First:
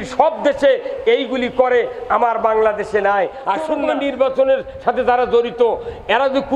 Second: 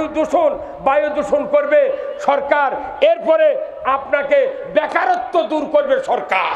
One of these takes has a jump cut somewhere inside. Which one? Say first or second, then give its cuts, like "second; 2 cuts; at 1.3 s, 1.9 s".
first; 1 cut; at 3.7 s